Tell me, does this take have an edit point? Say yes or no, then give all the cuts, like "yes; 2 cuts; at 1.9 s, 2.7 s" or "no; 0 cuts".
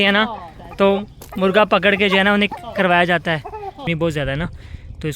yes; 1 cut; at 3.8 s